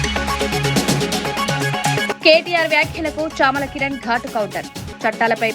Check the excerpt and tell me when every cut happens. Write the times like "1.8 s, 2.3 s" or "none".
2.1 s